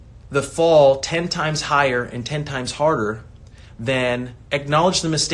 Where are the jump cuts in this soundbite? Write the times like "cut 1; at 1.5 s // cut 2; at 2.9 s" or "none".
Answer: cut 1; at 4.4 s